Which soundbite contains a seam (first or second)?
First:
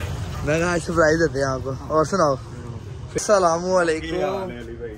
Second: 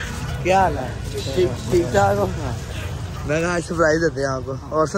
first